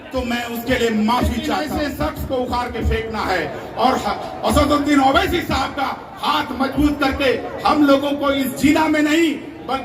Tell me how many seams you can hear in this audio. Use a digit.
1